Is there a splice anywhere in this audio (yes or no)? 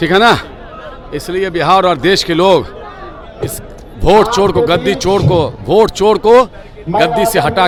no